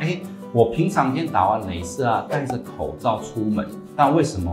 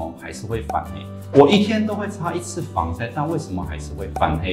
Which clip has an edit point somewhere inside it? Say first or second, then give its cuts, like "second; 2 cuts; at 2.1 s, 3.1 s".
second; 1 cut; at 1.2 s